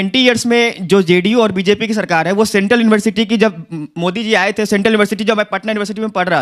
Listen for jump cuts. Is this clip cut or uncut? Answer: uncut